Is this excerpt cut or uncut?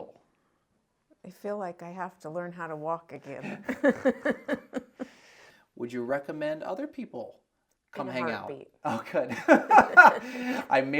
cut